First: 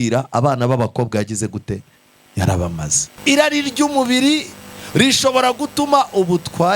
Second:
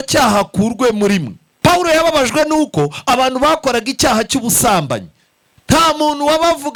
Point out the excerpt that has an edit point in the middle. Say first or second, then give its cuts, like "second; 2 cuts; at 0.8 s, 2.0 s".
first; 1 cut; at 3.1 s